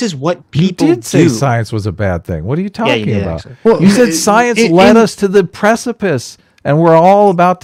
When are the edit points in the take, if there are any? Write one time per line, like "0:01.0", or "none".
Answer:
none